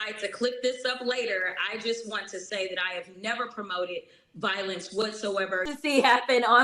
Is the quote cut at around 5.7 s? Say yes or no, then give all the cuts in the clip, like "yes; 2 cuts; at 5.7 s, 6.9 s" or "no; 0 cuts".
yes; 1 cut; at 5.7 s